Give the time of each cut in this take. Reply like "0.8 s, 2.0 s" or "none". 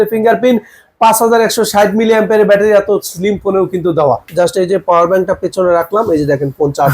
4.3 s

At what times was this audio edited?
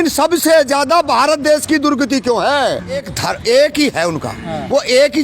3.1 s

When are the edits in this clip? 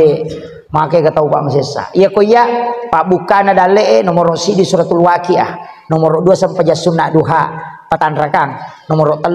none

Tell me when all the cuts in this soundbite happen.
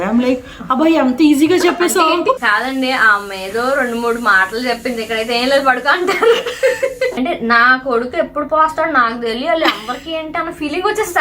2.4 s, 7.1 s

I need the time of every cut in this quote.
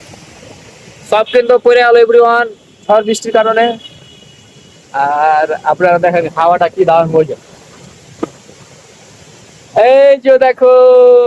none

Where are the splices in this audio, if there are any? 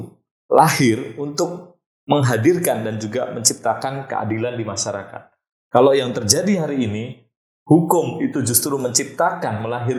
none

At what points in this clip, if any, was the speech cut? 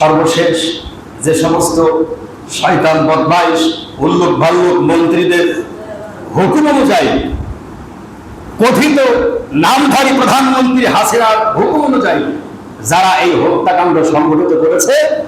none

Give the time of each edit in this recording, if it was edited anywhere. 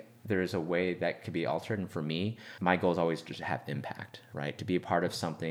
2.5 s

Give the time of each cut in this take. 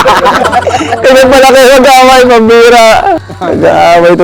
3.3 s

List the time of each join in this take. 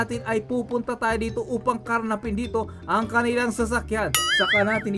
none

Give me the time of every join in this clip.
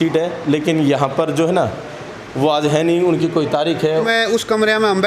4.1 s

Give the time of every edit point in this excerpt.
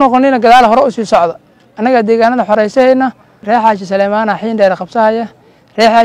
3.3 s

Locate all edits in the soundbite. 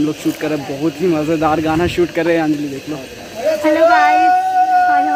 none

